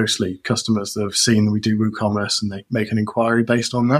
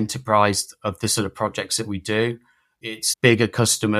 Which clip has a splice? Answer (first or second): second